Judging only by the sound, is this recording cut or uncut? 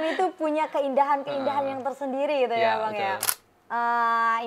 cut